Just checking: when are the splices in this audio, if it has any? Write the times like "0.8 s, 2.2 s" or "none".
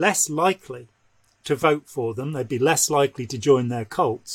none